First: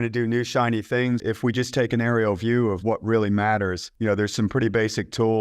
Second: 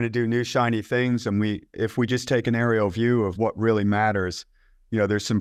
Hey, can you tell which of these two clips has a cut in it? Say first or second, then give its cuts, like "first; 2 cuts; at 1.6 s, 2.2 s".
first; 2 cuts; at 1.2 s, 3.8 s